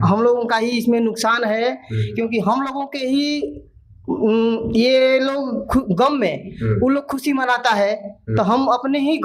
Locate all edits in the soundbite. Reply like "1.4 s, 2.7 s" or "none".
none